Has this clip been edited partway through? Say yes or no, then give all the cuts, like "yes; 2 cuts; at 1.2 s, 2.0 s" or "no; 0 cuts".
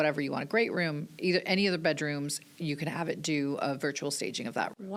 no; 0 cuts